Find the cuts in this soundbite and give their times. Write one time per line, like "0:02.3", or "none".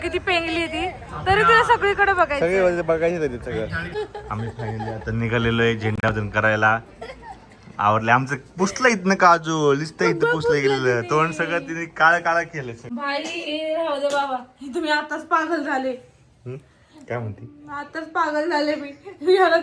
0:03.8
0:12.8